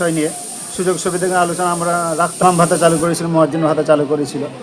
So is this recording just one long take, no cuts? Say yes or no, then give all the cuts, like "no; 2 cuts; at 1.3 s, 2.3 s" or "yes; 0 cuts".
no; 1 cut; at 2.4 s